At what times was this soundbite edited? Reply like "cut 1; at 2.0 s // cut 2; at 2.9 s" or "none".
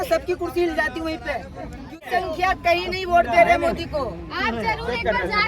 cut 1; at 2.0 s